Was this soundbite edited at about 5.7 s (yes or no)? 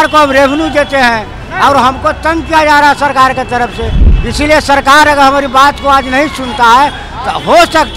no